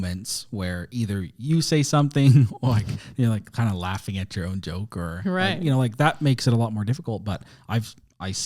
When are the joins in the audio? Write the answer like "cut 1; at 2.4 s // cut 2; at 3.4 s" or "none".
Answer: none